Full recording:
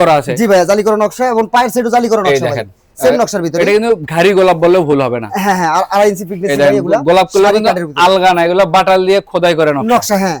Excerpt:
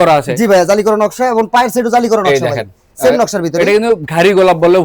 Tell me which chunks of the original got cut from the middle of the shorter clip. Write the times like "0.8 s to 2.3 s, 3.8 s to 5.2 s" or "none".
none